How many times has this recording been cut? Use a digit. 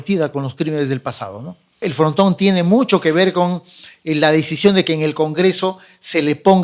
1